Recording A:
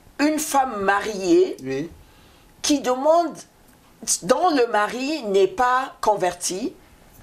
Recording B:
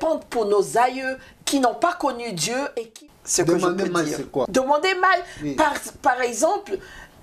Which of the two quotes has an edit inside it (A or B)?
B